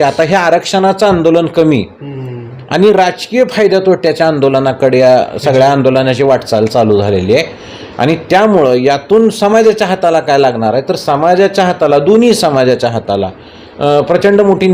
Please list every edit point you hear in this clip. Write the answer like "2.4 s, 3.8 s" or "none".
none